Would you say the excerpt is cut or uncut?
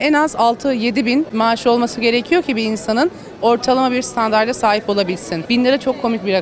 cut